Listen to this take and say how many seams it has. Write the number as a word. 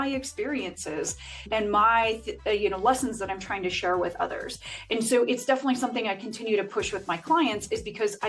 zero